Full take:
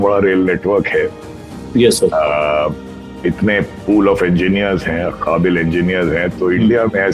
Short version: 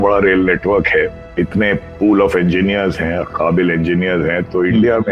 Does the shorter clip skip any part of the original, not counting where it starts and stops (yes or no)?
yes